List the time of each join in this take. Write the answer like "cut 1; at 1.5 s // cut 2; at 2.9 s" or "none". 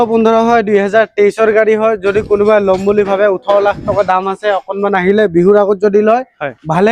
none

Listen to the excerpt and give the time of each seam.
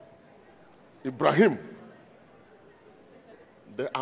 none

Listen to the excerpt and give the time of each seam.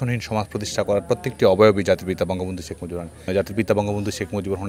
cut 1; at 3.3 s

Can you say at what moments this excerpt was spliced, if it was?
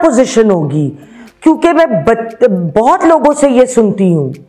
none

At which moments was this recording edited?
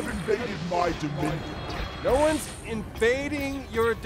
cut 1; at 1.9 s

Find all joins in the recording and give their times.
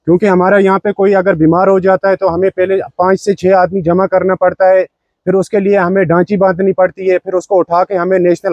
none

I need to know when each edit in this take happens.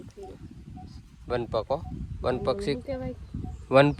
none

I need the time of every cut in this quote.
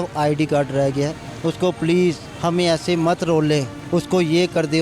cut 1; at 1.2 s // cut 2; at 2.3 s // cut 3; at 3.8 s

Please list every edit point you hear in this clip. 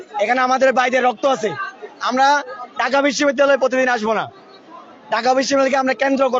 none

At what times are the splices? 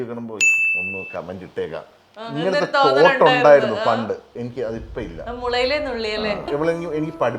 cut 1; at 4.3 s // cut 2; at 6.4 s

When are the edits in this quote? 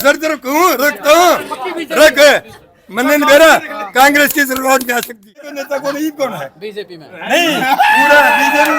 cut 1; at 5.6 s

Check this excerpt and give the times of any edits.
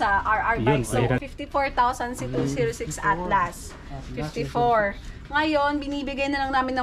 cut 1; at 1.2 s

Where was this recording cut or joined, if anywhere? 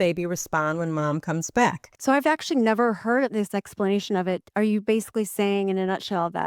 cut 1; at 1.9 s // cut 2; at 3.3 s // cut 3; at 4.5 s

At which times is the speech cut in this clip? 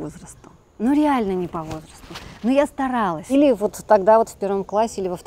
cut 1; at 3.2 s

